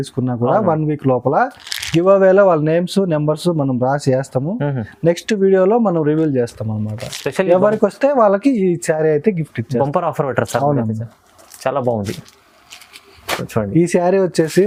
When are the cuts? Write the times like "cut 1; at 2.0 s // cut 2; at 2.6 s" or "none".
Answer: none